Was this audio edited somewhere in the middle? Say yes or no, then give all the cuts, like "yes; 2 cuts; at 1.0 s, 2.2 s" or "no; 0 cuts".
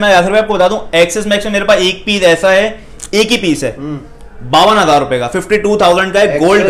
no; 0 cuts